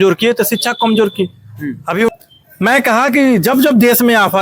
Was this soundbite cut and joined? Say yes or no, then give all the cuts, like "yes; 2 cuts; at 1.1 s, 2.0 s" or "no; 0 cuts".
yes; 1 cut; at 2.1 s